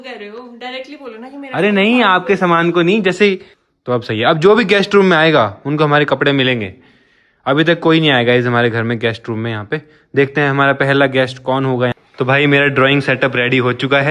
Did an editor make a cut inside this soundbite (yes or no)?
yes